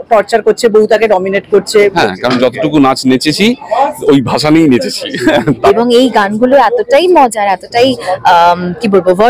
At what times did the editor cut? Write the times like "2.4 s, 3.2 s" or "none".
1.9 s, 5.6 s